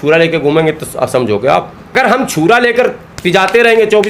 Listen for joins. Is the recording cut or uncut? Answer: cut